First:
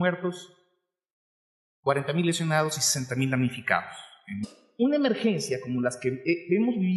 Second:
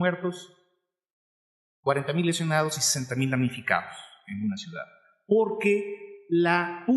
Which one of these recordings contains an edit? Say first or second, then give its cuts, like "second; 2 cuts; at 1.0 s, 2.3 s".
second; 1 cut; at 4.4 s